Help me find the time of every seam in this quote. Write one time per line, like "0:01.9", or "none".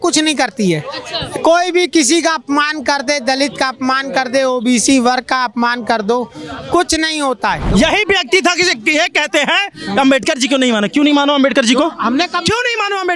0:07.6

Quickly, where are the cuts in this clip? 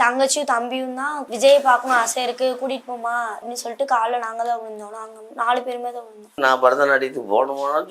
0:01.2
0:03.5
0:06.3

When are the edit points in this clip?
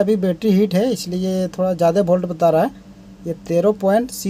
none

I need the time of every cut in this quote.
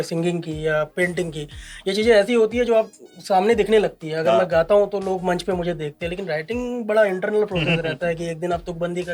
none

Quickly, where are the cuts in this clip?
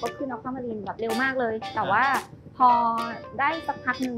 0:01.7

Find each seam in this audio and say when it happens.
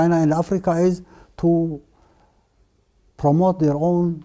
none

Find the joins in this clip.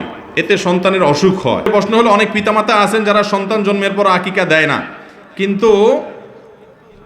0:01.7

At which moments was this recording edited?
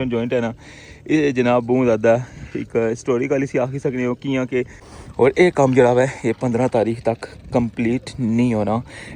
0:04.8

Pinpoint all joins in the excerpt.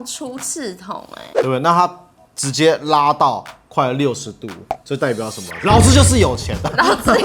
0:01.2

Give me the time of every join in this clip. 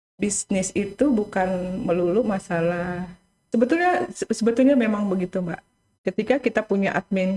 0:03.4

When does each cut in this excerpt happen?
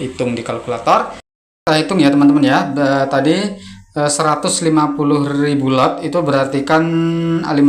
0:01.4

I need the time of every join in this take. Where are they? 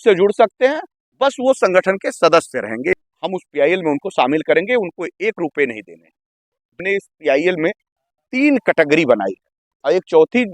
0:02.9
0:06.8

